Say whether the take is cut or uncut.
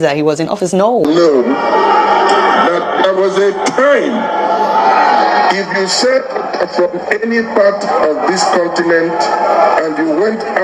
cut